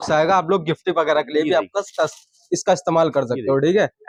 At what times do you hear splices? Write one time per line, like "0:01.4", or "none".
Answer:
none